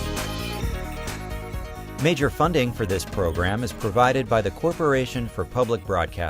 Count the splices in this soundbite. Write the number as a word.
one